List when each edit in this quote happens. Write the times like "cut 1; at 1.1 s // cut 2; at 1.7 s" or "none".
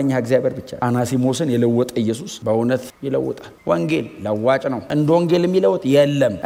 none

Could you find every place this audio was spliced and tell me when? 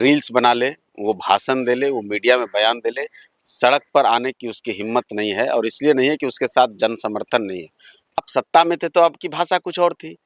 cut 1; at 8.2 s

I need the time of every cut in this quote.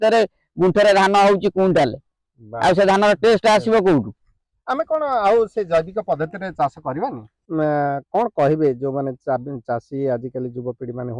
cut 1; at 7.3 s

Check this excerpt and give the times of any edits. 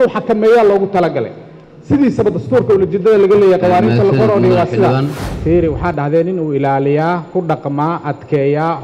cut 1; at 5.2 s

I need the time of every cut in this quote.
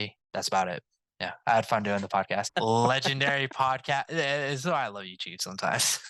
cut 1; at 2.5 s

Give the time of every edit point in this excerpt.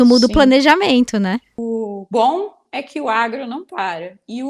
cut 1; at 1.5 s

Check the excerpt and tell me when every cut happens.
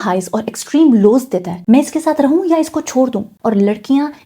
cut 1; at 1.6 s // cut 2; at 3.3 s

